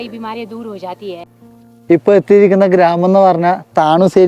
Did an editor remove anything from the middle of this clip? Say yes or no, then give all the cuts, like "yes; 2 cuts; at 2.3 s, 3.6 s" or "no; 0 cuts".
yes; 1 cut; at 1.3 s